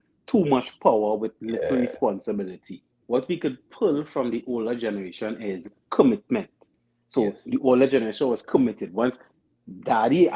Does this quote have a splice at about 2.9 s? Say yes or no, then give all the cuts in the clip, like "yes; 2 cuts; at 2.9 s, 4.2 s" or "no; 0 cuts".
yes; 1 cut; at 2.9 s